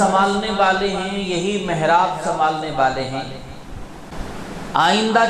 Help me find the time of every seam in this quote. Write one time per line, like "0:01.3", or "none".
0:04.1